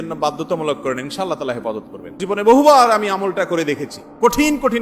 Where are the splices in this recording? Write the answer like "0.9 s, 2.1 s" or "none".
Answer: 2.2 s